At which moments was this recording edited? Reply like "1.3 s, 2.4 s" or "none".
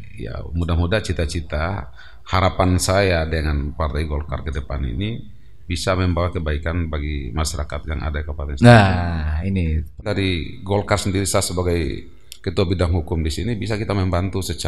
9.9 s